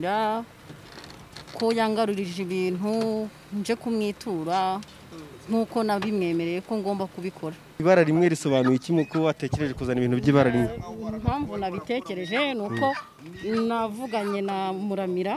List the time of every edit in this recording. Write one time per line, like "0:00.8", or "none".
0:07.7

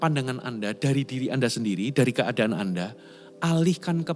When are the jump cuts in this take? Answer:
none

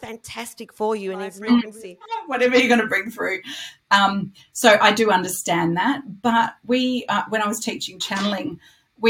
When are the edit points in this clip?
0:02.2

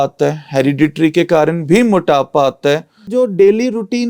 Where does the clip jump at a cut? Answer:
0:03.1

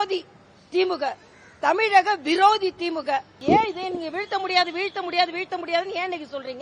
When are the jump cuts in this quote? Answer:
0:03.4

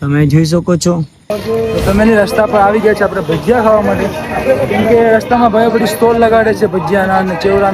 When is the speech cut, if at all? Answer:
0:01.5

